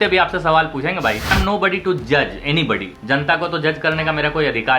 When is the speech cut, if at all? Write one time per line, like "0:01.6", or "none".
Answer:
0:01.3
0:02.9